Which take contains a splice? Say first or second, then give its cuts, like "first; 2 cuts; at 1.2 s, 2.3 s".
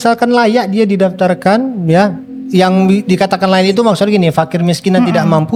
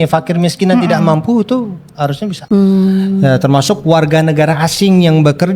second; 1 cut; at 2.4 s